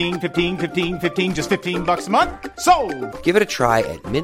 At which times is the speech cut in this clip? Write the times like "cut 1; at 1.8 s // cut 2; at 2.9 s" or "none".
none